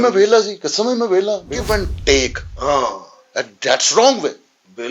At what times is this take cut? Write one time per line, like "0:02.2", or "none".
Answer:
0:01.6